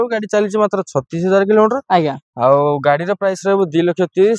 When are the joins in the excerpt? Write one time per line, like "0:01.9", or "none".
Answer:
none